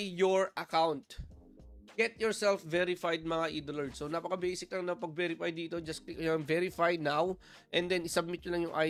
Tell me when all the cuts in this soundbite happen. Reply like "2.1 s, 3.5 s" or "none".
none